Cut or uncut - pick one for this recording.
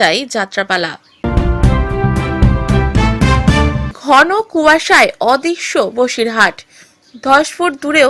cut